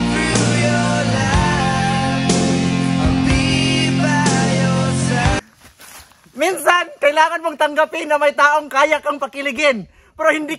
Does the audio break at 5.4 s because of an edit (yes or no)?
yes